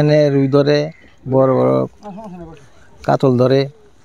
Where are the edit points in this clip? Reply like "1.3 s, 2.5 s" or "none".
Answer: none